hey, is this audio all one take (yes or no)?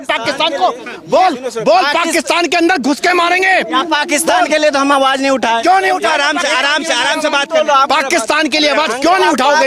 yes